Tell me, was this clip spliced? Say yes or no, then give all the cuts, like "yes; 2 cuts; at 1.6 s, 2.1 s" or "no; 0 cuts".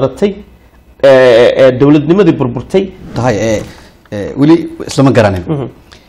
yes; 1 cut; at 3.1 s